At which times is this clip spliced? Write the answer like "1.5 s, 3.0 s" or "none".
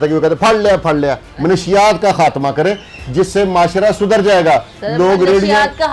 1.3 s